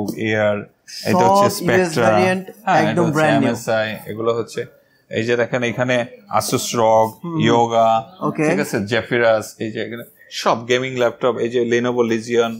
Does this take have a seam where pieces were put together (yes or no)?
no